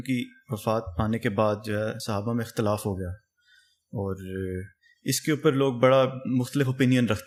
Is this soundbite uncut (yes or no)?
yes